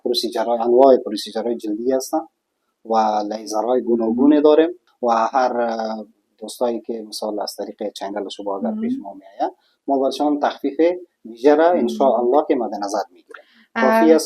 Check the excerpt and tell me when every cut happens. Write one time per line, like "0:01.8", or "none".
0:04.8